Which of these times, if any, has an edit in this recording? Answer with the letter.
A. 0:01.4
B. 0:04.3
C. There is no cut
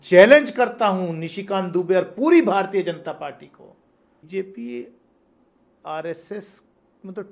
B